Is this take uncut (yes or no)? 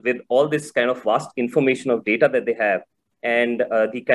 yes